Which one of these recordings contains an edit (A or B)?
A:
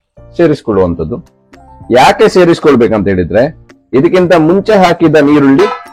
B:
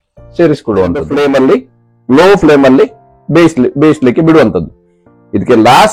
B